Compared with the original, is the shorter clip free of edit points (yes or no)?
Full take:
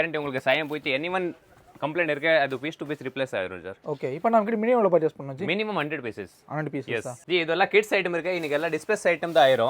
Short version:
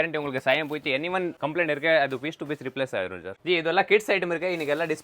no